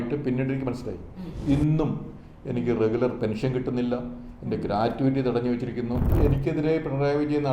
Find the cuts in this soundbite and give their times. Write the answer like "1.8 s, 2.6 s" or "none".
1.3 s, 6.1 s